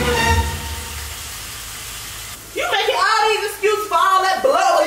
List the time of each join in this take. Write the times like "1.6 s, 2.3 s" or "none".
2.3 s